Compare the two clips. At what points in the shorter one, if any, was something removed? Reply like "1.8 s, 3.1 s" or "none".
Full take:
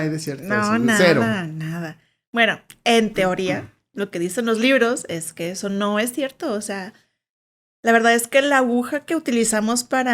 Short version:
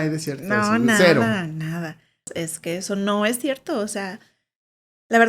2.3 s